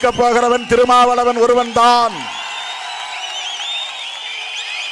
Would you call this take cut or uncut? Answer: uncut